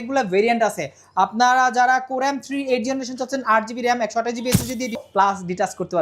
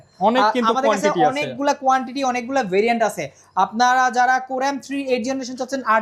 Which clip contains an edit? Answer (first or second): first